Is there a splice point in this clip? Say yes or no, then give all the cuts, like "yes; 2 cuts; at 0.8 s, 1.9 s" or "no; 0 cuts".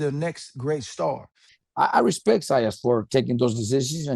yes; 1 cut; at 1.4 s